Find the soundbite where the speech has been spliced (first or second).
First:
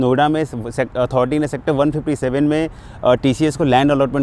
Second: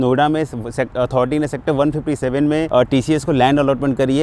second